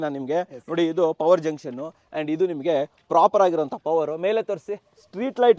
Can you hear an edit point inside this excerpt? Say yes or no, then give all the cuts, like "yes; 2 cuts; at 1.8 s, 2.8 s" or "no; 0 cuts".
no; 0 cuts